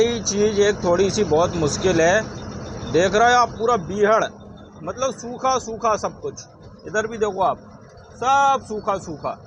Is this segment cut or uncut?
uncut